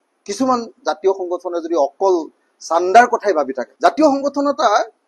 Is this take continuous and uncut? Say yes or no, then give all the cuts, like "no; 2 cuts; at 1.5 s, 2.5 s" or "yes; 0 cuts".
no; 1 cut; at 3.6 s